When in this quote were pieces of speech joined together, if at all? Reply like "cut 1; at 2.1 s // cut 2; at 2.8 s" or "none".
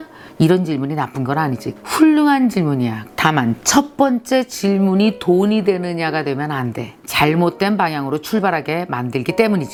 none